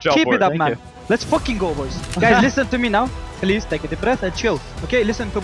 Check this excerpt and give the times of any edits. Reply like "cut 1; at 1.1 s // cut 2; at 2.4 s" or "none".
cut 1; at 2.1 s

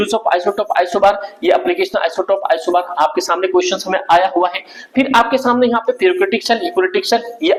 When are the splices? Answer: none

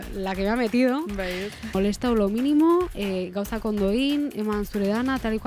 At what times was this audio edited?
cut 1; at 1.7 s

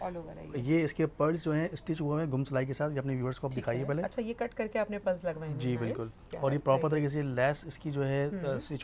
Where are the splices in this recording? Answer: none

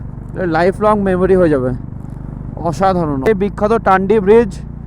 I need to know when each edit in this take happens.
cut 1; at 3.3 s

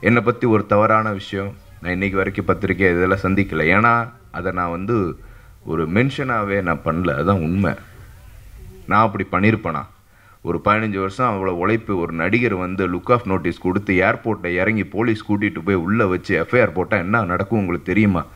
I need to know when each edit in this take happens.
none

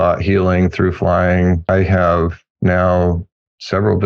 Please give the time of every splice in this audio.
cut 1; at 1.7 s

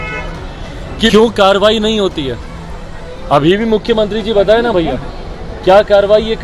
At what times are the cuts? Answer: cut 1; at 1.1 s

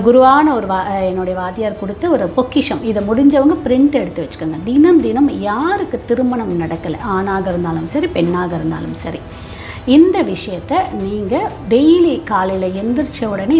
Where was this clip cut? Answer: none

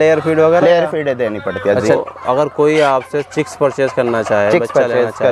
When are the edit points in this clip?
cut 1; at 2.0 s

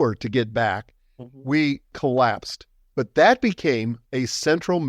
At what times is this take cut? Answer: cut 1; at 4.0 s

